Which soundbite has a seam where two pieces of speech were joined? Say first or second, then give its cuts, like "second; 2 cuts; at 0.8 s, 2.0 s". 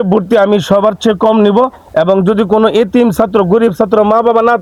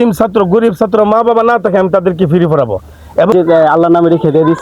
second; 1 cut; at 3.3 s